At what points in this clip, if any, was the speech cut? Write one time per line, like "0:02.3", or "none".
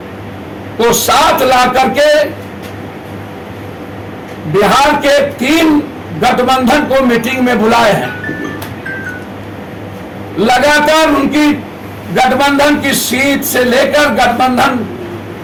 none

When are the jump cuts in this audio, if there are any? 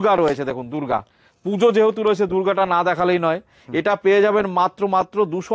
none

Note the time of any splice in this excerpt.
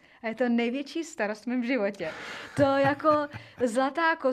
none

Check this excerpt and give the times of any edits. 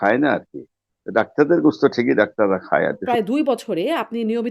0:03.0

